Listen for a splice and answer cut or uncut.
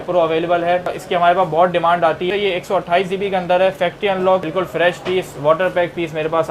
cut